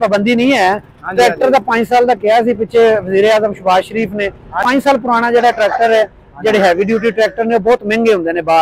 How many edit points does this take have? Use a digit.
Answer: 1